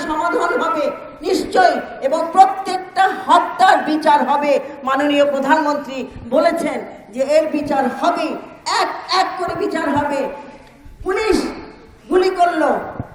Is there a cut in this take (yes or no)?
no